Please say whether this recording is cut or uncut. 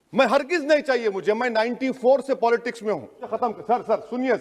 cut